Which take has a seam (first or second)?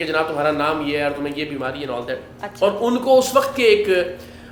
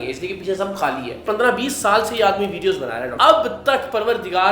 second